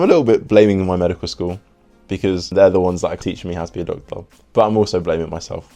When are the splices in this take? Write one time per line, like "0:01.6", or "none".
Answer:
none